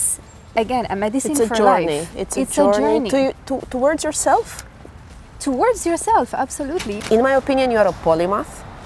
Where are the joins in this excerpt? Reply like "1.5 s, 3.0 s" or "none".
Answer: 7.0 s